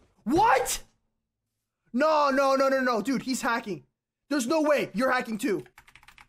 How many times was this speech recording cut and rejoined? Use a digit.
0